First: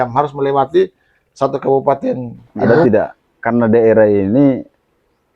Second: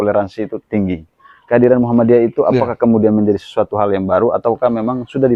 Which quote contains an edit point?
first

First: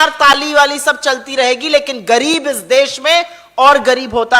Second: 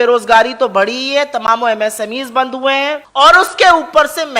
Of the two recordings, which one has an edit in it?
second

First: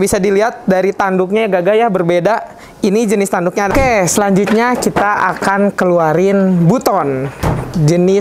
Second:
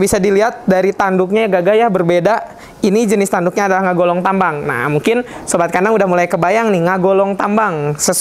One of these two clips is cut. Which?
first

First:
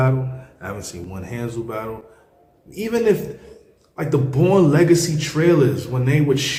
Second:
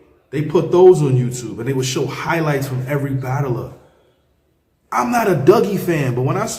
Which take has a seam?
second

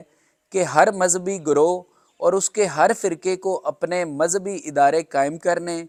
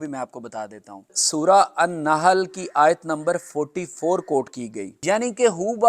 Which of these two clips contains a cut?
second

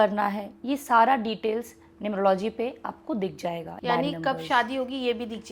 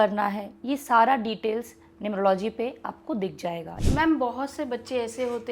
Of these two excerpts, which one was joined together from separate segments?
second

